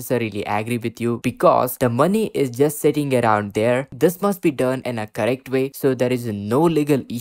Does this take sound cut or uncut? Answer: cut